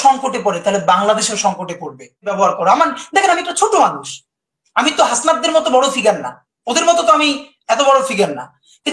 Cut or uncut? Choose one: cut